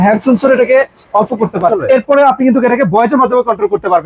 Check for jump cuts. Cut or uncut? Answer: cut